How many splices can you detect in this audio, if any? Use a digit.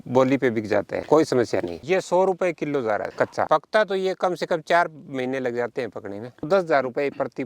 3